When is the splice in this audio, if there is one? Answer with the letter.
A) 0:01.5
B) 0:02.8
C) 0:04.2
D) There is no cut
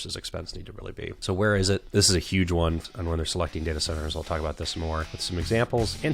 B